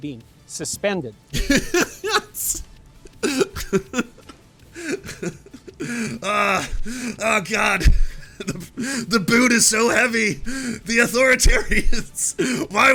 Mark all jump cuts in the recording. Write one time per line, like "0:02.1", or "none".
none